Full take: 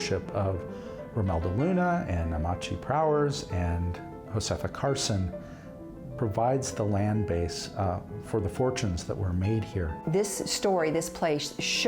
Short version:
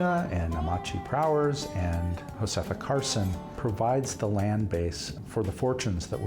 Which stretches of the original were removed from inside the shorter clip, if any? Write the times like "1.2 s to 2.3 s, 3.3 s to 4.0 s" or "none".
4.0 s to 4.1 s, 5.4 s to 6.0 s, 7.7 s to 8.1 s